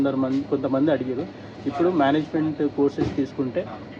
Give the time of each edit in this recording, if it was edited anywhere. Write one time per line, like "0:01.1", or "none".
none